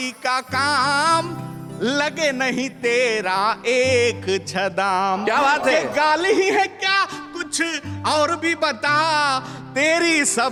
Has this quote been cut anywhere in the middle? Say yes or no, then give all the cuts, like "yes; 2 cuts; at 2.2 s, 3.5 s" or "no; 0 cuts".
no; 0 cuts